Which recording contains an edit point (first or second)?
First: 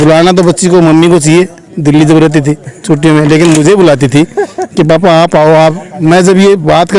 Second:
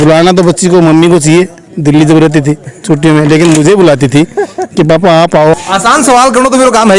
second